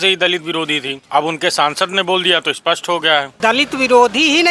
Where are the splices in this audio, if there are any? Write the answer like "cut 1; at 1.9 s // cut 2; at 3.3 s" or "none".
cut 1; at 0.9 s // cut 2; at 3.4 s